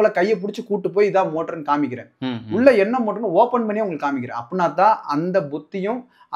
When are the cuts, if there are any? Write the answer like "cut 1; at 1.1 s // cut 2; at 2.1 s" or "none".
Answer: none